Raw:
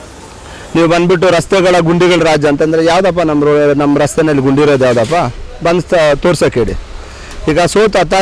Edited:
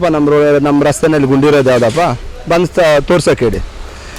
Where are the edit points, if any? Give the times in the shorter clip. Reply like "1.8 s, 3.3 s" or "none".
none